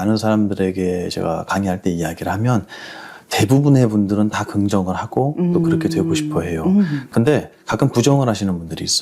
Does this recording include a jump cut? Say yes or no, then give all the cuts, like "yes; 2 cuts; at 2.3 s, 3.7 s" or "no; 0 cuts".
no; 0 cuts